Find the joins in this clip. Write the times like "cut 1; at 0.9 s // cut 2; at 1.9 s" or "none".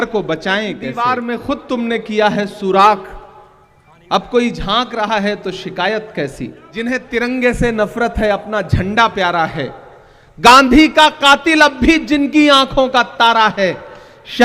cut 1; at 1.0 s // cut 2; at 6.7 s